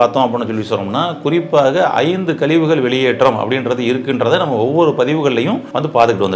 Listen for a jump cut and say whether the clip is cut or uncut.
uncut